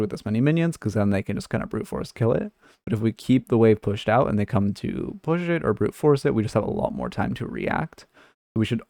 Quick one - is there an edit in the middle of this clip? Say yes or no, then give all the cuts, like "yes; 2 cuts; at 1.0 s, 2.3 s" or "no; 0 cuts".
no; 0 cuts